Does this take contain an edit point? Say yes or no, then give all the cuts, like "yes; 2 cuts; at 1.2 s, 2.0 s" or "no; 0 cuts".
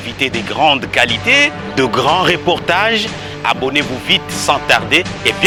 no; 0 cuts